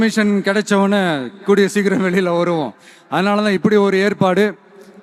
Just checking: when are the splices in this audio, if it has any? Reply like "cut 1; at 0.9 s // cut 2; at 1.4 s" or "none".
none